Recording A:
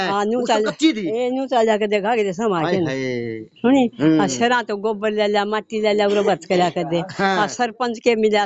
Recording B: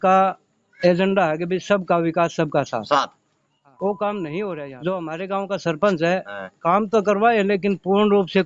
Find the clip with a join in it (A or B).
B